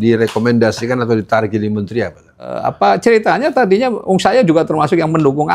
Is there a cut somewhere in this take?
yes; 1 cut; at 2.6 s

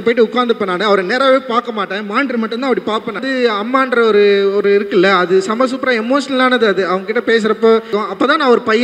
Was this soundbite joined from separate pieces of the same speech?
yes; 2 cuts; at 3.2 s, 7.9 s

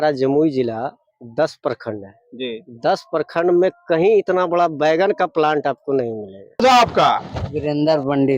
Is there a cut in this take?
yes; 1 cut; at 6.6 s

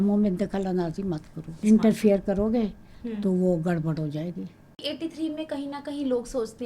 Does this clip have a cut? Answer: yes; 2 cuts; at 1.5 s, 4.8 s

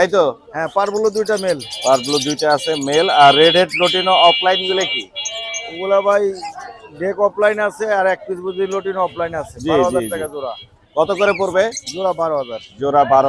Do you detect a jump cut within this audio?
no; 0 cuts

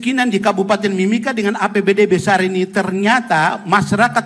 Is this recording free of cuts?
yes; 0 cuts

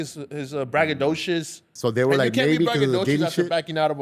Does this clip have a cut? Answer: yes; 1 cut; at 1.7 s

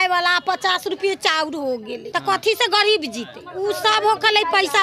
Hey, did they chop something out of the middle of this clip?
yes; 2 cuts; at 2.0 s, 3.4 s

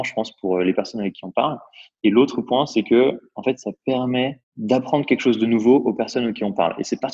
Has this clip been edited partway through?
yes; 1 cut; at 4.5 s

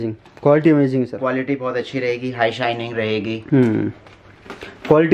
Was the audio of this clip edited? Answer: no; 0 cuts

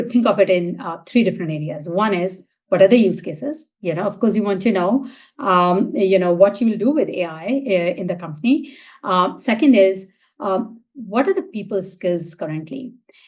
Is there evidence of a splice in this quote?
no; 0 cuts

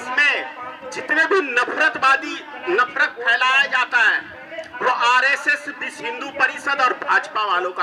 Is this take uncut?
yes; 0 cuts

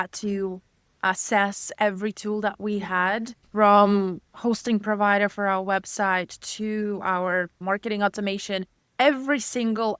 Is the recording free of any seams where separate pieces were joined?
no; 2 cuts; at 3.4 s, 7.6 s

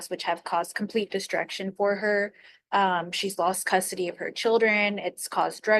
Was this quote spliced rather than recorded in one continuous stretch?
no; 0 cuts

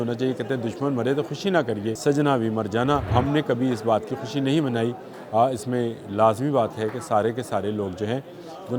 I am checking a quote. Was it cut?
yes; 2 cuts; at 2.0 s, 3.1 s

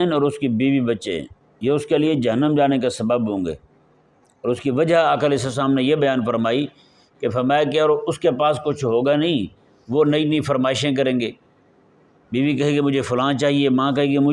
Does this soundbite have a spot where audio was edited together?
no; 0 cuts

